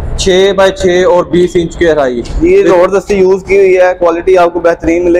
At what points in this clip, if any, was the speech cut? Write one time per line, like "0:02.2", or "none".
none